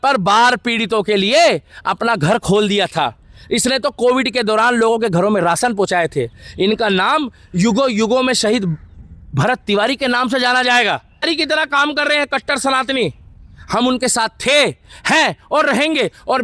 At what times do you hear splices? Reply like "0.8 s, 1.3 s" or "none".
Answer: 11.2 s